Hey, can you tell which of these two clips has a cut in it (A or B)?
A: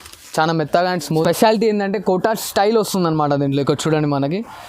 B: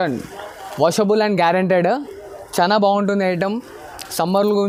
A